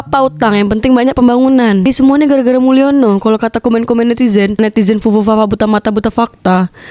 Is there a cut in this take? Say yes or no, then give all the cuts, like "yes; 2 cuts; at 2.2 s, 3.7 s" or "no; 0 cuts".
yes; 1 cut; at 1.9 s